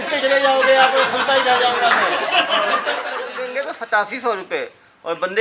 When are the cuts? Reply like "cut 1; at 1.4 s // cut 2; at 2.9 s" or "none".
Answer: cut 1; at 3.4 s